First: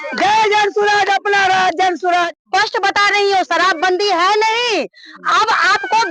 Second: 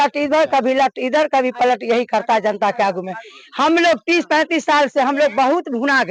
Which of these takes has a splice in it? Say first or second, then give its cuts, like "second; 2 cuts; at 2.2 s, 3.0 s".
first; 1 cut; at 2.4 s